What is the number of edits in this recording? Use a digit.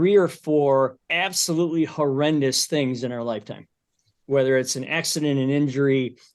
1